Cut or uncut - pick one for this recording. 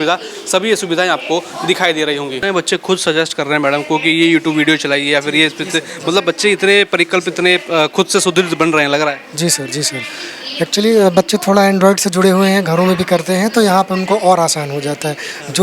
uncut